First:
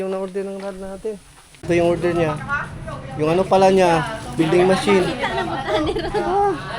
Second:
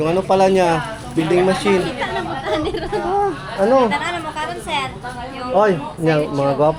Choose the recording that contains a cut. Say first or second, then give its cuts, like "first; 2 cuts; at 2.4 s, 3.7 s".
first; 1 cut; at 1.7 s